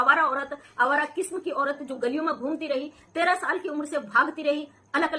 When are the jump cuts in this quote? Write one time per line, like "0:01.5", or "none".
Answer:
none